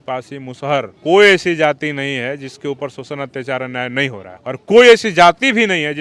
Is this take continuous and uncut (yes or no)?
no